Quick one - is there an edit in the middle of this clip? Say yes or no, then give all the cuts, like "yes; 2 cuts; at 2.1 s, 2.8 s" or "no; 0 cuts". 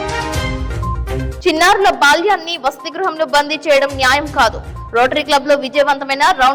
no; 0 cuts